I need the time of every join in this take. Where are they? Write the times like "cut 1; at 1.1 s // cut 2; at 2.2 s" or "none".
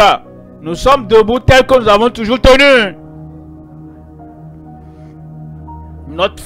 none